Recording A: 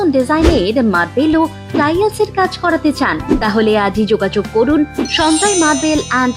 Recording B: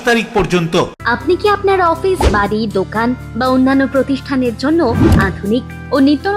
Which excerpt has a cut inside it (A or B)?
B